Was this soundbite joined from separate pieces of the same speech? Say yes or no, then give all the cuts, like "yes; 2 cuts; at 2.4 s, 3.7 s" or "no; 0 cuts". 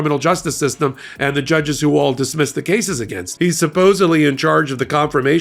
yes; 1 cut; at 3.3 s